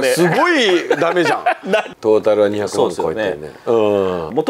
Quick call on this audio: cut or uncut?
cut